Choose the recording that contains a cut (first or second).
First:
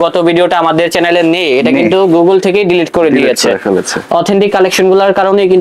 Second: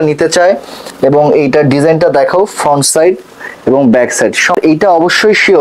second